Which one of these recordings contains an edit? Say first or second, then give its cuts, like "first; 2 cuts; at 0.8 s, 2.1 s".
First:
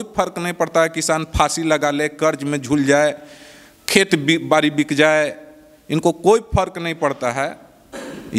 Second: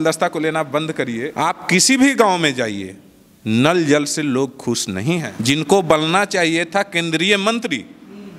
second; 2 cuts; at 1.3 s, 5.3 s